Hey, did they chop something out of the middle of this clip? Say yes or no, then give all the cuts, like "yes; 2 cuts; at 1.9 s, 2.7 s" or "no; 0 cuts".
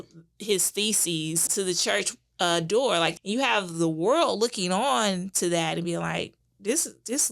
yes; 2 cuts; at 1.4 s, 3.1 s